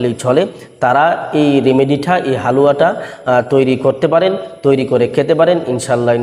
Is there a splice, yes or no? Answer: no